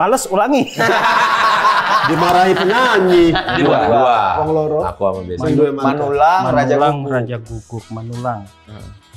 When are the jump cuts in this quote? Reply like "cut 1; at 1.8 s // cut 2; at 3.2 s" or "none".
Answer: cut 1; at 3.5 s